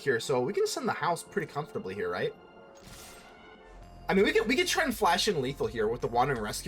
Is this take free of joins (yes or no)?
no